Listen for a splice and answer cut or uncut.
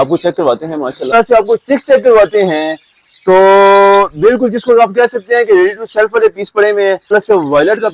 cut